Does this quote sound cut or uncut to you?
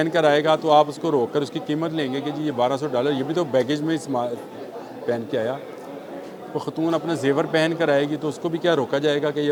uncut